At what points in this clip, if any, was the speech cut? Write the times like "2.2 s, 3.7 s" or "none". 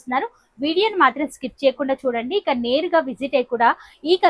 none